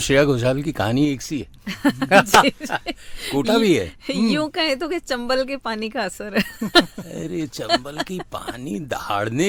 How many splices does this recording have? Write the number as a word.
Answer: zero